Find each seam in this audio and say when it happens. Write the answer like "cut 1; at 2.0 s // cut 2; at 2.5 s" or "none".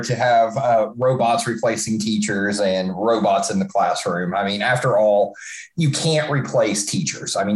none